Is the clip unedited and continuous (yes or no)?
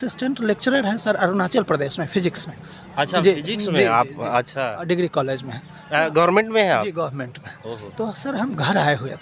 yes